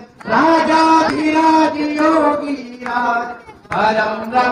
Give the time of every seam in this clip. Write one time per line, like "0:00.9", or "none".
none